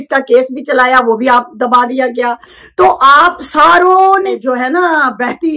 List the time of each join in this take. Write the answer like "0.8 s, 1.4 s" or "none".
none